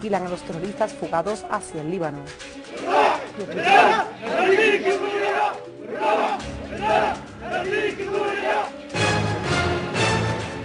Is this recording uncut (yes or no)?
yes